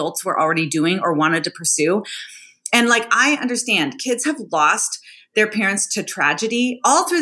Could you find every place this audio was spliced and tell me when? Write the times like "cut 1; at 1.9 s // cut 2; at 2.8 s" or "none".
none